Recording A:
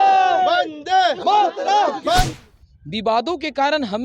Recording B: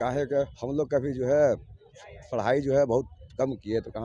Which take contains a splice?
A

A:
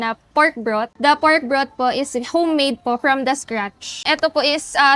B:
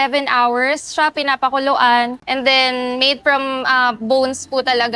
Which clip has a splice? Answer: A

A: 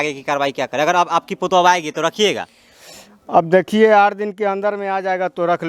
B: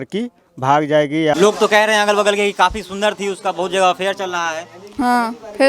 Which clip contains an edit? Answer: B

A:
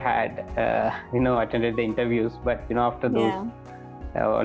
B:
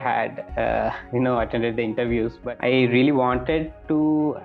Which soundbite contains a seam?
B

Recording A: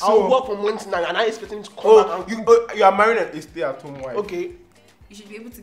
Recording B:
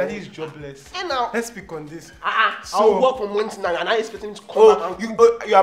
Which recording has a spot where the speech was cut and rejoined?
A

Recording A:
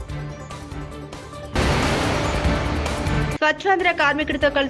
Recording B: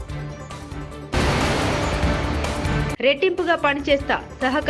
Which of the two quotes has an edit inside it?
B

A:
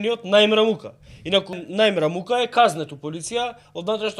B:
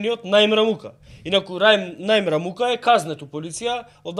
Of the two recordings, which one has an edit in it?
A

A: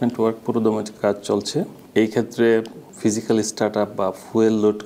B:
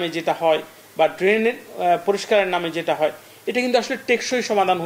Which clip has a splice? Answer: A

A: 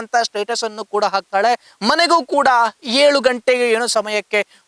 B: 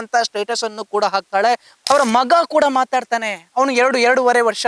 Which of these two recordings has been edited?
B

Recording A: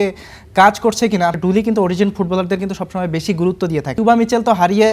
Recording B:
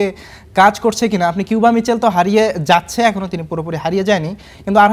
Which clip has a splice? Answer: A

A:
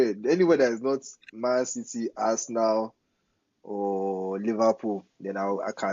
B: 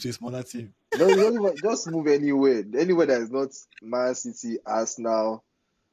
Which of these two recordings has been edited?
B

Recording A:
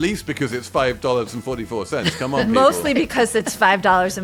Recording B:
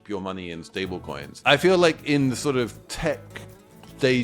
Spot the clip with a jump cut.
B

